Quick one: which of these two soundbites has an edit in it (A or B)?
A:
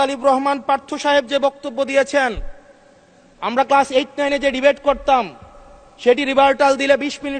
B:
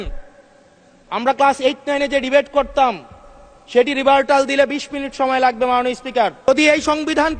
B